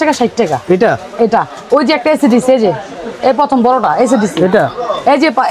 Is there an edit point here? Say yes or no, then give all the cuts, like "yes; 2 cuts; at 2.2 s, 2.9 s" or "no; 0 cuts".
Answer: no; 0 cuts